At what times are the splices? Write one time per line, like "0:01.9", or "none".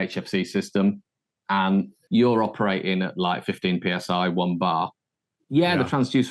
0:02.0